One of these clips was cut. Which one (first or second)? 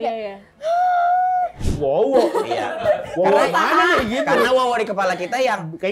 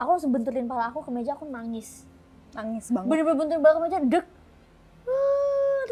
first